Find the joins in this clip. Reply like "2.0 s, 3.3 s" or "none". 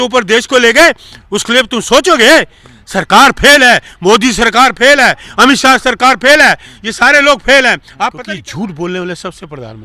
8.2 s